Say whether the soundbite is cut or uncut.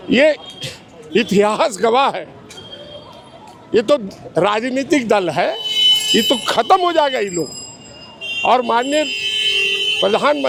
uncut